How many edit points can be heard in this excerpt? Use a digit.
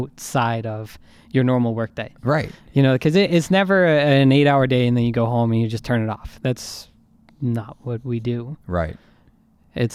0